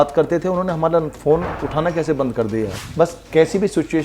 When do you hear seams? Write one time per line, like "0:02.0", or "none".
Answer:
0:02.8